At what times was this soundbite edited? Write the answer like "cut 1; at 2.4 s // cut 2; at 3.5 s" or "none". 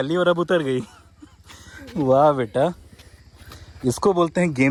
none

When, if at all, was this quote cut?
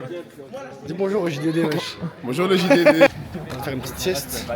cut 1; at 3.1 s

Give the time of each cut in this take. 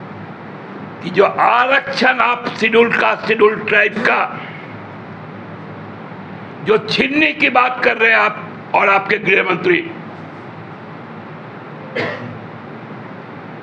none

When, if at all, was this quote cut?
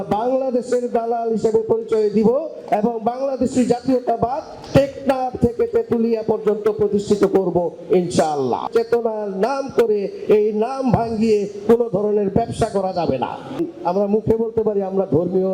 cut 1; at 8.7 s // cut 2; at 13.6 s

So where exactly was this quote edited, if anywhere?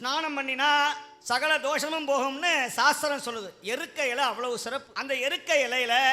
cut 1; at 1.1 s // cut 2; at 4.9 s

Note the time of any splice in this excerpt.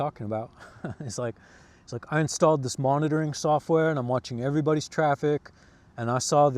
none

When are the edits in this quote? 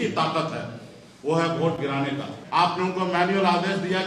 cut 1; at 2.4 s

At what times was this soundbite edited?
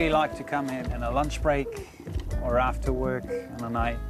none

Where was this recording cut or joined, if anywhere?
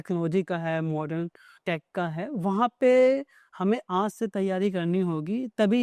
cut 1; at 1.6 s

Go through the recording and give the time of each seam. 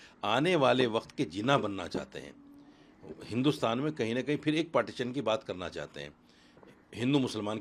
none

